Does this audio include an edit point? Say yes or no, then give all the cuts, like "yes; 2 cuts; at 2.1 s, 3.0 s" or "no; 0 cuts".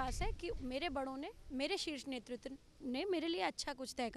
no; 0 cuts